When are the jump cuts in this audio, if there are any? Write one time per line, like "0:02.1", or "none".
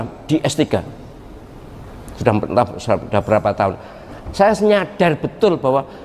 none